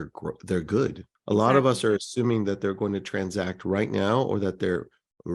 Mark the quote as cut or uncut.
cut